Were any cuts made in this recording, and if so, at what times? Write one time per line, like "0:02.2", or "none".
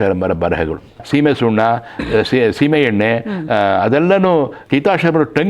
0:01.0
0:04.6